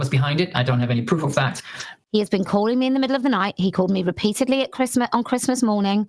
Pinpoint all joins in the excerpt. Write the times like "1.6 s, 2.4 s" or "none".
1.9 s